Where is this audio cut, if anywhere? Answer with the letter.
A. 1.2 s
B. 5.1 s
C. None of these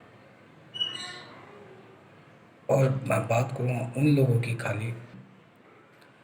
B